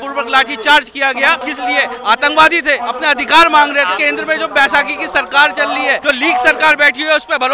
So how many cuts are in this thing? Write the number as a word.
four